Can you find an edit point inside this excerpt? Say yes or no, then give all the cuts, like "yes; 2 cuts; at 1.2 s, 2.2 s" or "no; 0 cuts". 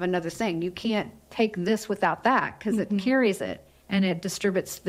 no; 0 cuts